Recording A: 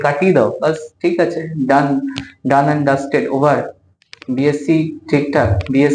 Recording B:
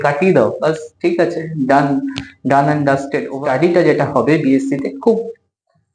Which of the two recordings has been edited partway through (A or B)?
B